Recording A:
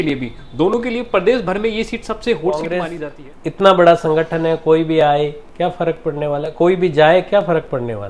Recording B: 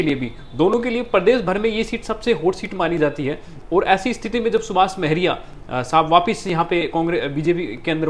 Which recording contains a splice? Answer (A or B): A